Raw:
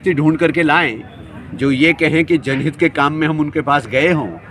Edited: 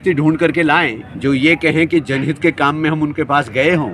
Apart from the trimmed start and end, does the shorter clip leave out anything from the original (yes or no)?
yes